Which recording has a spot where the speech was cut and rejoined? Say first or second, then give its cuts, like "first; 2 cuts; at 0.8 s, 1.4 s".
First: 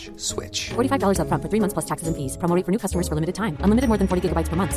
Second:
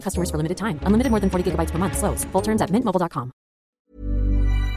second; 1 cut; at 3.8 s